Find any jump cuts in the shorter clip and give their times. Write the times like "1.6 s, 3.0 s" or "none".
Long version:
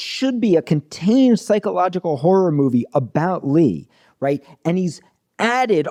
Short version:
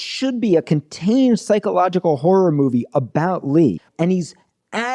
3.9 s